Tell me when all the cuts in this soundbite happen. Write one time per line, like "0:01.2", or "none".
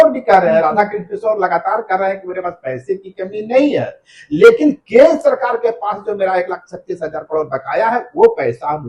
none